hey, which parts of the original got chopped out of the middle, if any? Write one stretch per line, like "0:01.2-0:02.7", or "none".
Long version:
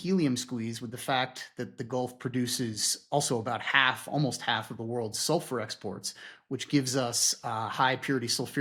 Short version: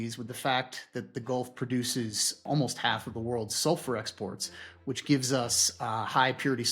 0:03.0-0:04.0